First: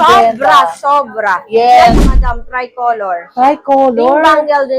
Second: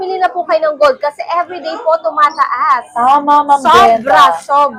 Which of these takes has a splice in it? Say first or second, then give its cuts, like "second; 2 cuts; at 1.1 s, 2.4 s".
first; 1 cut; at 2.1 s